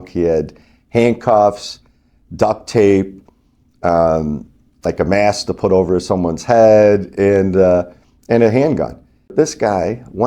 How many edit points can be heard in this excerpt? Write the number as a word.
one